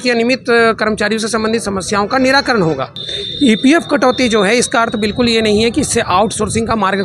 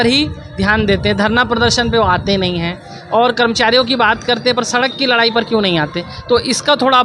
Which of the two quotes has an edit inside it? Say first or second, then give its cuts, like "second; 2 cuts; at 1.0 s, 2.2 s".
first; 1 cut; at 3.1 s